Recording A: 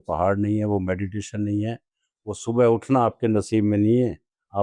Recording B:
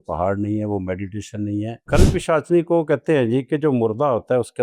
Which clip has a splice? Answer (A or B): B